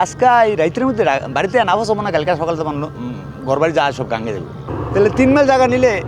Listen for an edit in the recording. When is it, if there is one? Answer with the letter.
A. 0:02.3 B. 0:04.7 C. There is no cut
B